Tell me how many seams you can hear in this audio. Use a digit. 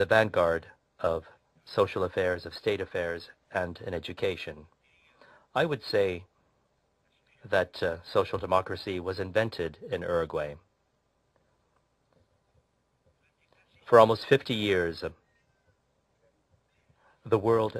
1